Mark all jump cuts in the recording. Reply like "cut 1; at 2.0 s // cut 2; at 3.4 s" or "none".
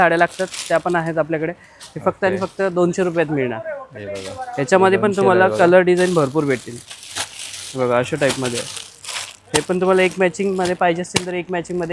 none